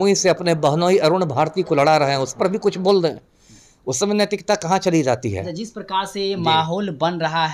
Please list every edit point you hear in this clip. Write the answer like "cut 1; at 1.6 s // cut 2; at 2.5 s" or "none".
none